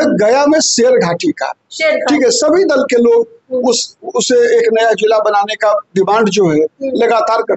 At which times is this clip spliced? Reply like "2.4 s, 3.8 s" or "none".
none

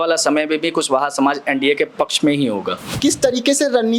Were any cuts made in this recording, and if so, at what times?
2.9 s

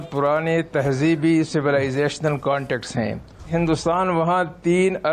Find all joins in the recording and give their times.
3.5 s

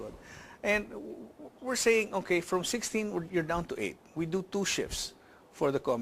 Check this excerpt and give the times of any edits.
2.7 s

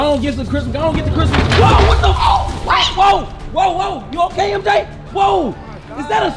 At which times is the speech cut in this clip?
none

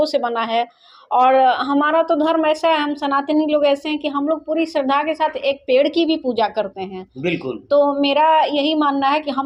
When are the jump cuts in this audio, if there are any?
none

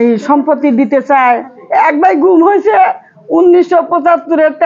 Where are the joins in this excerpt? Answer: 1.5 s

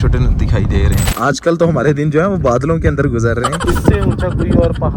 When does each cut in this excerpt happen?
1.1 s, 3.6 s

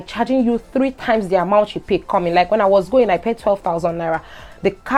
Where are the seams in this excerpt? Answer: none

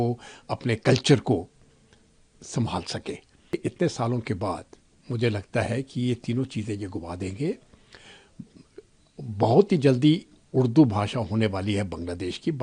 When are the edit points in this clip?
3.5 s

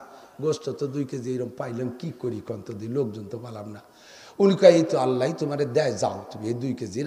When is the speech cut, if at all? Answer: none

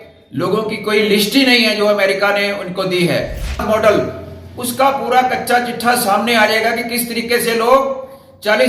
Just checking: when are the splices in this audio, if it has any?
3.6 s

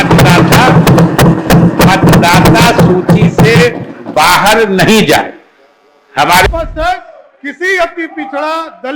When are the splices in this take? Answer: 6.5 s

